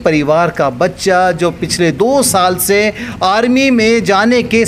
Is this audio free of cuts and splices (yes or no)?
yes